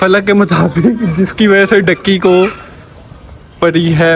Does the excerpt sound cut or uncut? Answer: uncut